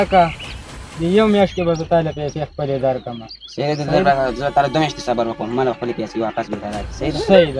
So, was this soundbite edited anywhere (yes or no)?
no